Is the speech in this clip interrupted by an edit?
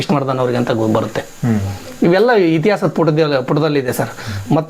no; 0 cuts

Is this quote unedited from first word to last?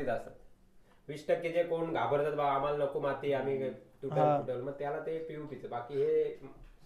yes; 0 cuts

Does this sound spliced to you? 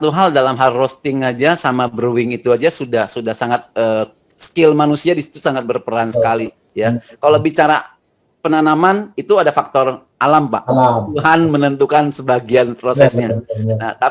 no; 0 cuts

